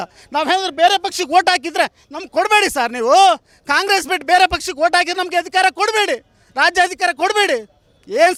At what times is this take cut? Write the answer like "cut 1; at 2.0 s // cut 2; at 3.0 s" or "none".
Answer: none

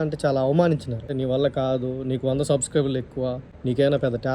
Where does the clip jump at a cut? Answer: cut 1; at 1.1 s // cut 2; at 3.5 s

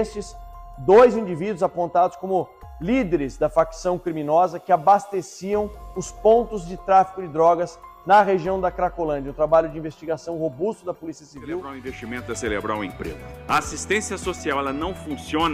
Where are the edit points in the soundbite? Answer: cut 1; at 11.7 s

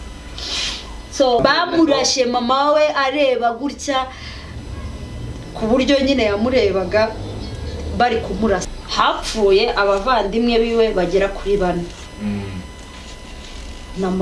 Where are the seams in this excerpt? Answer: cut 1; at 1.4 s // cut 2; at 8.7 s

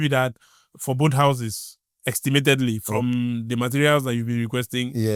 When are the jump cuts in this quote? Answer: none

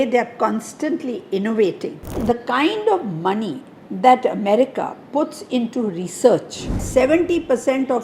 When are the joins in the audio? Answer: cut 1; at 2.2 s // cut 2; at 6.8 s

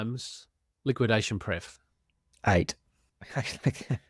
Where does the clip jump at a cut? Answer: none

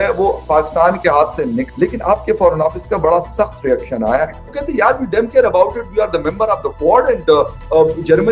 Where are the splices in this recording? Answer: cut 1; at 1.7 s // cut 2; at 4.5 s

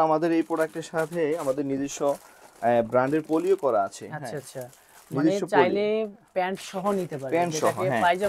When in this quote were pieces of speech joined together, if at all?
none

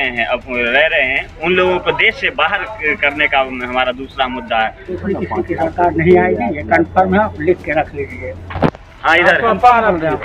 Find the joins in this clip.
cut 1; at 5.0 s

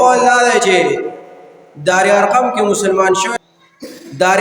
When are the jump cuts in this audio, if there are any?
cut 1; at 3.3 s

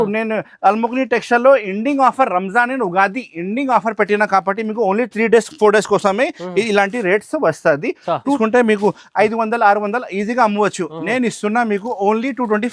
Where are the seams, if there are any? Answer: cut 1; at 8.4 s

